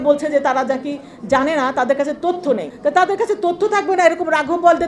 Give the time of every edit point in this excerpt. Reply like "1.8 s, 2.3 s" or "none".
2.7 s